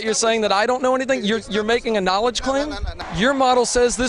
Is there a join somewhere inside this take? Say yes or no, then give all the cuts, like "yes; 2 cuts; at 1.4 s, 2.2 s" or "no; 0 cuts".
yes; 1 cut; at 2.9 s